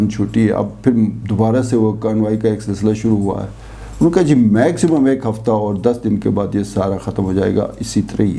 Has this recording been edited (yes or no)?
no